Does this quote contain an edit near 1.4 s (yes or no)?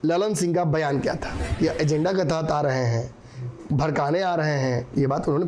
yes